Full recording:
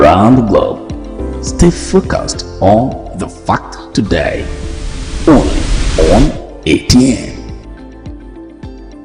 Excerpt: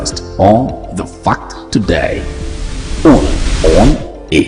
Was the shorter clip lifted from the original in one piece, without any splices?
no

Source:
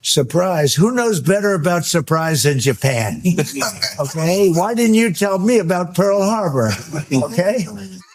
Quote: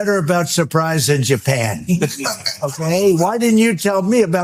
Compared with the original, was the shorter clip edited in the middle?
no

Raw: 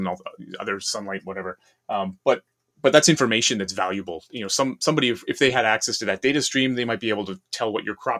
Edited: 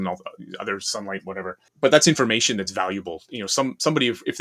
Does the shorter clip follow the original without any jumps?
no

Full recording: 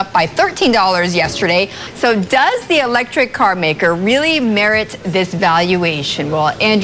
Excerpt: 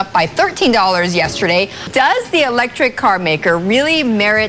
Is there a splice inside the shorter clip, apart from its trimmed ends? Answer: yes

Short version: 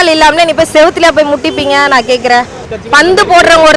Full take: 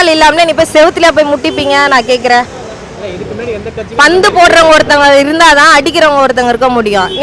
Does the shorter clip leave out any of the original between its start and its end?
yes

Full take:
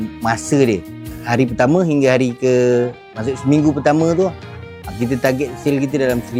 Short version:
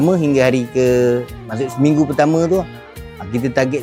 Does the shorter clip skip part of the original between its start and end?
no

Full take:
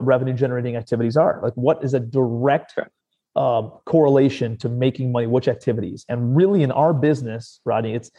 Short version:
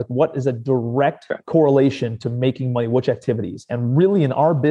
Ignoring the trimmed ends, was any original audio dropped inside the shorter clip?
yes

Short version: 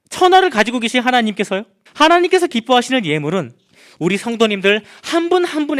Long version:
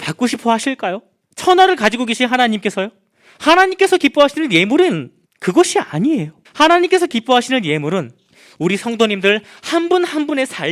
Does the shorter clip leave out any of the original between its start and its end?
yes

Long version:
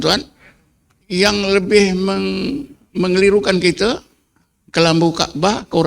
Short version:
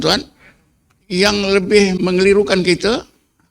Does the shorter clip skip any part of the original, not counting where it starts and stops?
yes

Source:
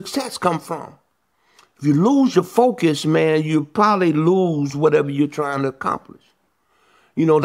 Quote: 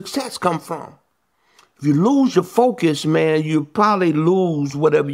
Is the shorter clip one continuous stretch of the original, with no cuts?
yes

